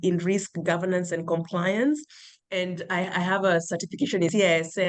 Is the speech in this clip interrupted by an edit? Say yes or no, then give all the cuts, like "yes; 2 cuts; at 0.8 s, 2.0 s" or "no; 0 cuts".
no; 0 cuts